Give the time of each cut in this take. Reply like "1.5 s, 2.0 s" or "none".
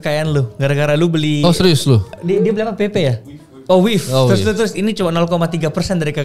2.2 s